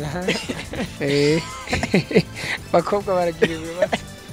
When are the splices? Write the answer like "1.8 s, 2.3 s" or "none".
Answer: 0.9 s